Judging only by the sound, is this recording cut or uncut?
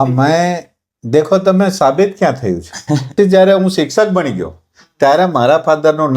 cut